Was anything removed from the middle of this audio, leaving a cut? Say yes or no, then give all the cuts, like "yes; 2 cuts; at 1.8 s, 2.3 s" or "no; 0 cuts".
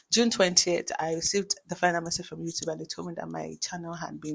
no; 0 cuts